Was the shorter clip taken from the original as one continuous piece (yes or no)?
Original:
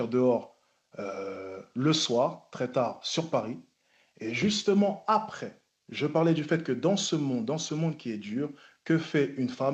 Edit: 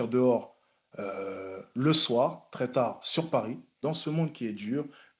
no